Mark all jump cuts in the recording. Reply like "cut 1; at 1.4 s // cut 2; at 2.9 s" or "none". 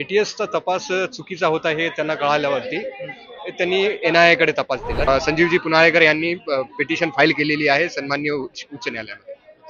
cut 1; at 5.1 s